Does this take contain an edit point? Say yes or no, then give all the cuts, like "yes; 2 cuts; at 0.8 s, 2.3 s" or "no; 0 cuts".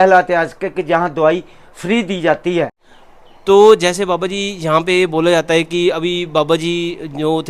yes; 1 cut; at 2.8 s